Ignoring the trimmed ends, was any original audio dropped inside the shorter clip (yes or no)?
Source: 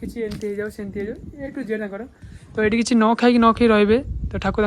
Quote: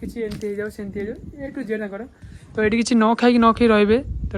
no